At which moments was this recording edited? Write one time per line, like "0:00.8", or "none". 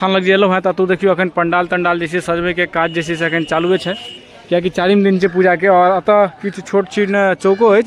none